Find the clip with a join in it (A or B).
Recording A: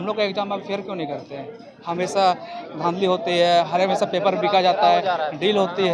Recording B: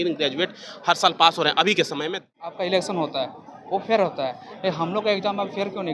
B